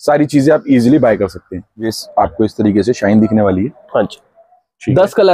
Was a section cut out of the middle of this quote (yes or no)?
yes